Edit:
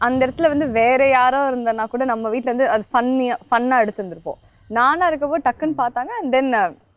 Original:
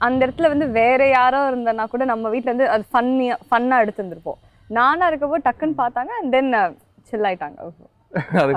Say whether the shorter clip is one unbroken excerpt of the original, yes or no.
yes